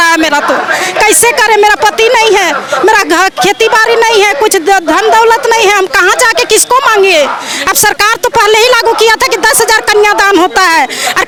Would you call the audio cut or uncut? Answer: uncut